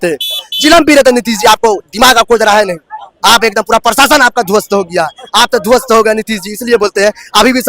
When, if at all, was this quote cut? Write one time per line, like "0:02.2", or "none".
none